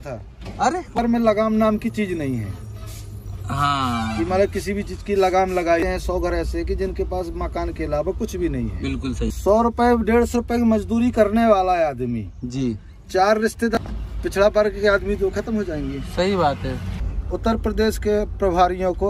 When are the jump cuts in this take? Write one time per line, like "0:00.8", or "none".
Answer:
0:01.0
0:05.9
0:09.3
0:13.7
0:16.9